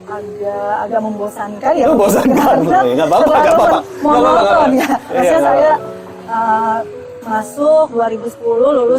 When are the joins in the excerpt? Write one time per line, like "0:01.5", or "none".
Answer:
none